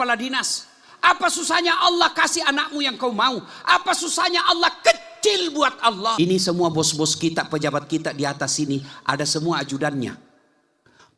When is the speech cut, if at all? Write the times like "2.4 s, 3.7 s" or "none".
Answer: 6.2 s